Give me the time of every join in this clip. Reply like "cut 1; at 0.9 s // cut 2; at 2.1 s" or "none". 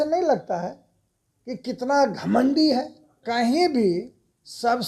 cut 1; at 3.2 s